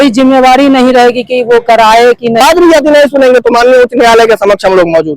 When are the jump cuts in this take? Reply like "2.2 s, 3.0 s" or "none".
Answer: 2.4 s

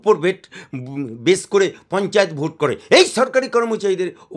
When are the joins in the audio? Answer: none

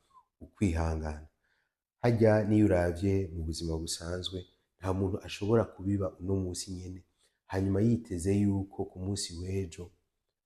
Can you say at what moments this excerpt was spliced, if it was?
none

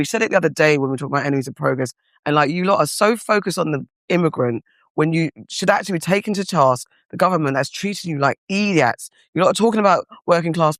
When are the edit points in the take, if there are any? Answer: none

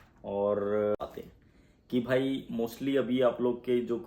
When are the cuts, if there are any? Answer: 1.0 s

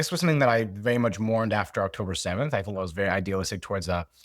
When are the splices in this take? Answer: none

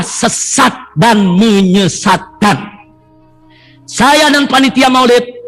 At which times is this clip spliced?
none

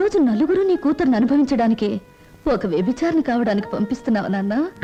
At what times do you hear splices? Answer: none

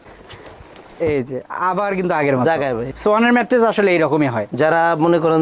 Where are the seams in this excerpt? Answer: 2.9 s, 4.4 s

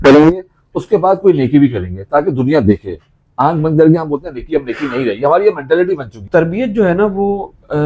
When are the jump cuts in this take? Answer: 6.1 s

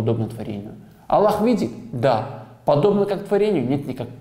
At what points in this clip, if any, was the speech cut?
none

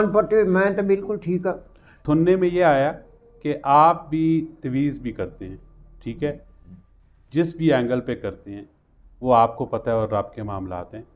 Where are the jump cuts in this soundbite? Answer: 2.0 s

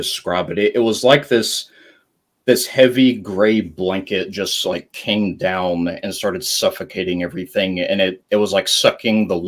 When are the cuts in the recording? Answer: none

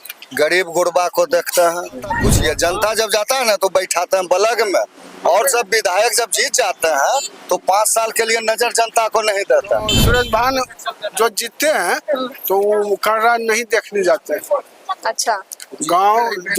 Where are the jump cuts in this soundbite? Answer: 2.3 s, 10.0 s

